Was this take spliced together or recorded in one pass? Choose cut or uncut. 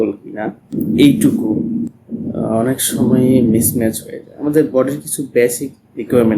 cut